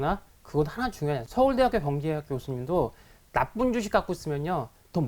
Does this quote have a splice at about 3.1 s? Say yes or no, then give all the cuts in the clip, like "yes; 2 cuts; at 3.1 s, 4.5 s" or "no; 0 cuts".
no; 1 cut; at 1.2 s